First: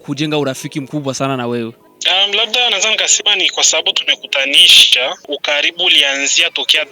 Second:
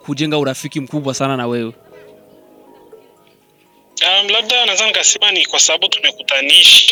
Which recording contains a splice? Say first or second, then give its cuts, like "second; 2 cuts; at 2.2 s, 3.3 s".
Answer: first; 2 cuts; at 1.9 s, 5.3 s